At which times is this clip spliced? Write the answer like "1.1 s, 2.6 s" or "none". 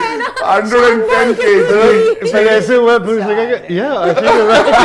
none